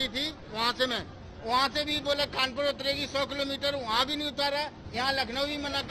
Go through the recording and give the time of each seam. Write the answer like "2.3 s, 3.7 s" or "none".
none

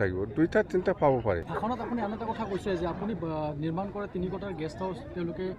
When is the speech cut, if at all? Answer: 1.5 s

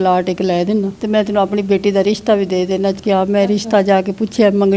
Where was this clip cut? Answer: 1.0 s, 3.0 s

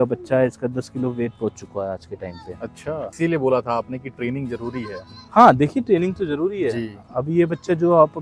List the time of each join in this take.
3.1 s

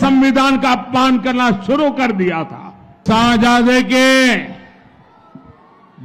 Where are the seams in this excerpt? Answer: 3.0 s

